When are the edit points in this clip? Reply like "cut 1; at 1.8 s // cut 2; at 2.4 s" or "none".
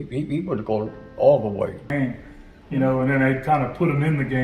cut 1; at 1.9 s